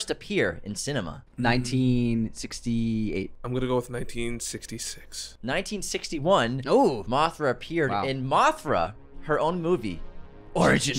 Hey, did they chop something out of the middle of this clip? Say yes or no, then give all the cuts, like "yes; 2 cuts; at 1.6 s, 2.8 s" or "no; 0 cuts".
yes; 2 cuts; at 1.2 s, 3.4 s